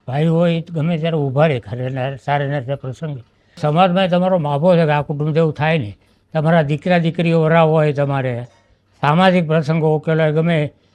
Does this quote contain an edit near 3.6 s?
yes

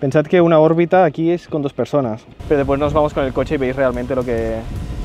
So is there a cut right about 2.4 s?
yes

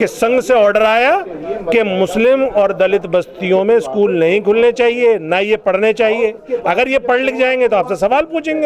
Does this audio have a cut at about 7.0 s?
no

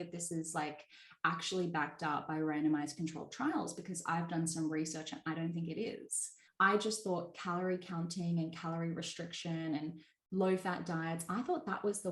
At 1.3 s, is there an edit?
no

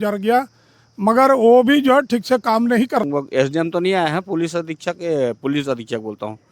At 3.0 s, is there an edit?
yes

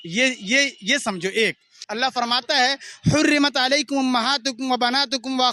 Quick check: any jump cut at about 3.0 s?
no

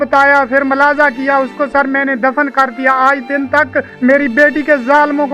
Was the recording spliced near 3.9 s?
yes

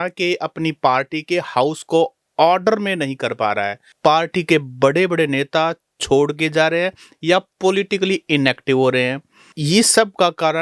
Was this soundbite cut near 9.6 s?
yes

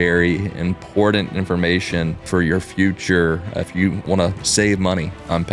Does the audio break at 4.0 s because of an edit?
yes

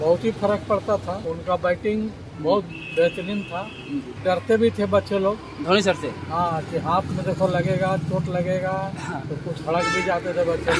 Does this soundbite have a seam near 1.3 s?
yes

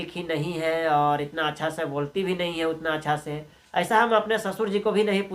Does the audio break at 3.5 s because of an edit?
yes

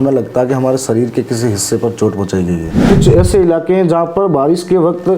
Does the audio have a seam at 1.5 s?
no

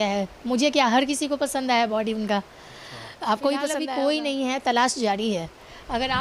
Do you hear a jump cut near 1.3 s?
no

